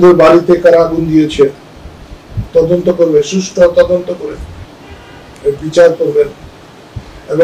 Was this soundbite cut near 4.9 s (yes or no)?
no